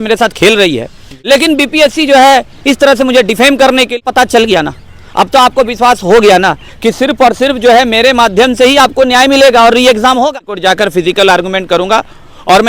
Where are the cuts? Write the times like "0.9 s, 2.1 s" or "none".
1.1 s, 4.0 s, 10.4 s